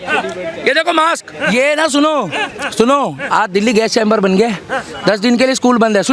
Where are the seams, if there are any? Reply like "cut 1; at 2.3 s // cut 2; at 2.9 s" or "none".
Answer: cut 1; at 1.5 s